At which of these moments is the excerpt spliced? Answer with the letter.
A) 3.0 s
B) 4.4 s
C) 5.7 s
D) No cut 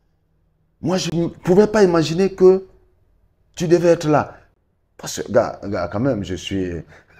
B